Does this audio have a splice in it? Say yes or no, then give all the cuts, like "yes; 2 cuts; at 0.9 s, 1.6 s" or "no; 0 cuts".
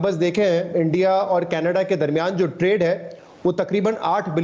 no; 0 cuts